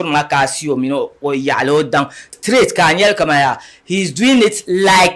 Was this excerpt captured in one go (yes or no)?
no